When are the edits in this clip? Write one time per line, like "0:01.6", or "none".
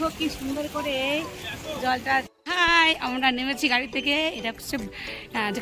0:02.5